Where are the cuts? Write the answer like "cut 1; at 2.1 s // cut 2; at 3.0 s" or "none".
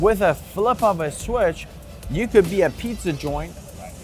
none

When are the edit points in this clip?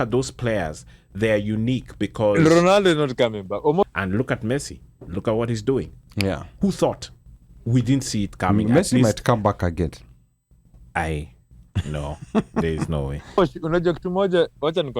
cut 1; at 3.8 s // cut 2; at 13.4 s

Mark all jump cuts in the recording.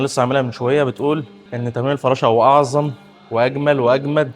none

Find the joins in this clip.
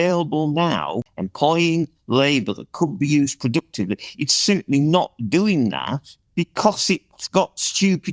cut 1; at 1.1 s

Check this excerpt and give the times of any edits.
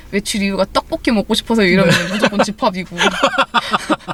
none

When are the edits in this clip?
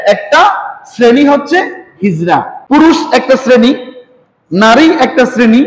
cut 1; at 2.5 s

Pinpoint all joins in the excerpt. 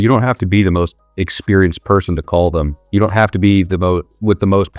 none

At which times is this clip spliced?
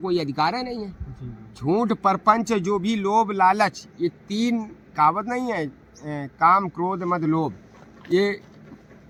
none

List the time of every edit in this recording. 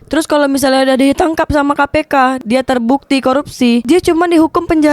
cut 1; at 2.4 s // cut 2; at 3.8 s

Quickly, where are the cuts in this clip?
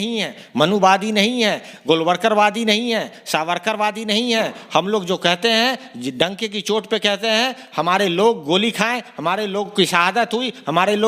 none

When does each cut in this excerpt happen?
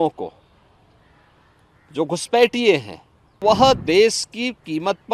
cut 1; at 3.4 s

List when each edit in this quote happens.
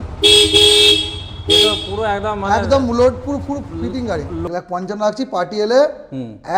cut 1; at 4.4 s

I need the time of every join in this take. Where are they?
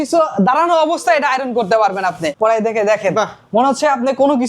cut 1; at 2.3 s

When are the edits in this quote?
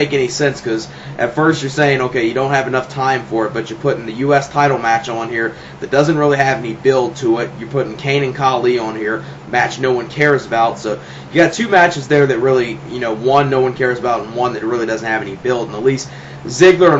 cut 1; at 9.2 s

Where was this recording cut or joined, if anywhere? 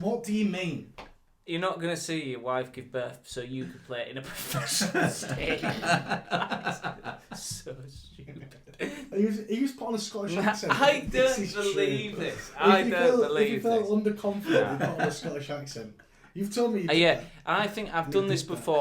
cut 1; at 9.0 s

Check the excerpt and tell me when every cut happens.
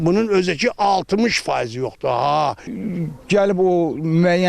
cut 1; at 2.7 s

